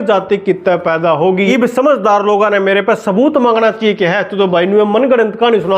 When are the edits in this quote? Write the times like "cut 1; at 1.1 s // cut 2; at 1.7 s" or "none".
cut 1; at 1.5 s